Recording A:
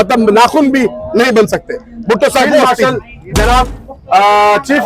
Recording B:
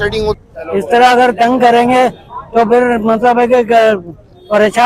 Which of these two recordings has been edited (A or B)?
A